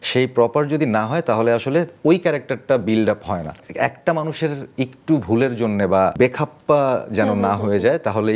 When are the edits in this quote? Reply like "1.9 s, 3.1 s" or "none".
3.5 s, 6.2 s